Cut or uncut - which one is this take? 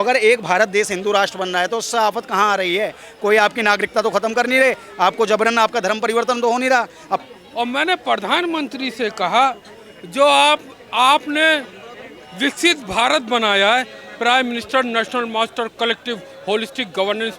cut